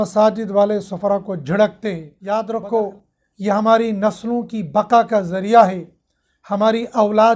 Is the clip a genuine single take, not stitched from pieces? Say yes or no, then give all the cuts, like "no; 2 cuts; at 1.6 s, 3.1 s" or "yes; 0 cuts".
no; 1 cut; at 2.1 s